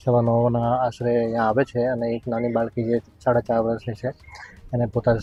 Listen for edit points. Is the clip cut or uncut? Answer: uncut